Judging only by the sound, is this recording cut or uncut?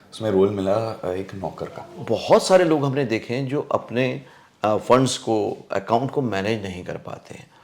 cut